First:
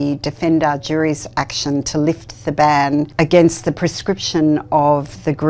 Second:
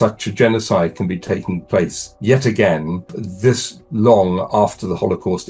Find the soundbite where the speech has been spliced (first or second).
second